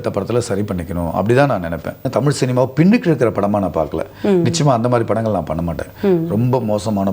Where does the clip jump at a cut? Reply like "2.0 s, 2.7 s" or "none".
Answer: 2.0 s

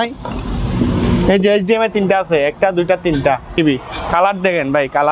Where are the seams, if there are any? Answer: 3.5 s

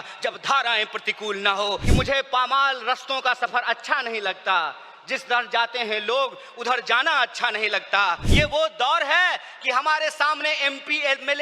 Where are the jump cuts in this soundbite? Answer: 1.8 s, 8.3 s

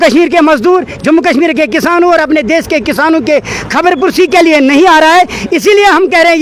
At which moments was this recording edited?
none

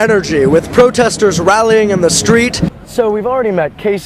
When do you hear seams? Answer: 2.7 s

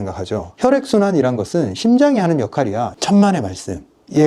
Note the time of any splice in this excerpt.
2.9 s

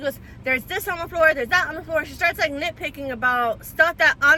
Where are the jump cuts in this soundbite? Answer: none

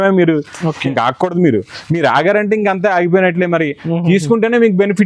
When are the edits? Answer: none

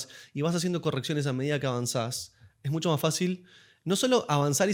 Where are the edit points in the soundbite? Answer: none

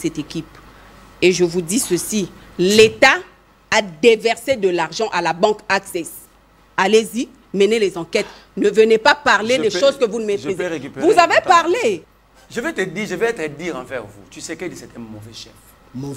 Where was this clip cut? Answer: 12.1 s

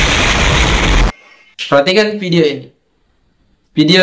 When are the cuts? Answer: none

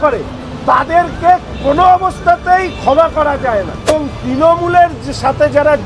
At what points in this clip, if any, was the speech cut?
3.9 s

